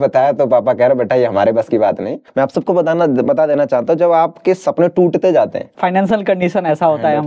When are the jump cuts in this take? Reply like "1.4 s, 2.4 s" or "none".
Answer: 2.2 s, 5.6 s